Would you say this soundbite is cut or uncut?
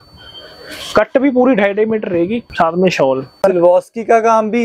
cut